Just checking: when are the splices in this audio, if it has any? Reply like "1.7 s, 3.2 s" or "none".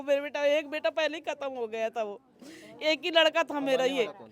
none